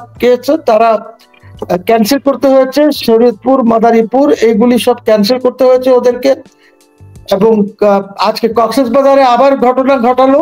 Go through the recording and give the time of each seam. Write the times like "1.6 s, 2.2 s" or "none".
none